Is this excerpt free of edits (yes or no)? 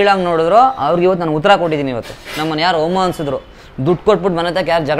yes